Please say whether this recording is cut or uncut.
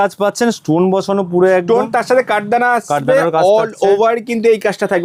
uncut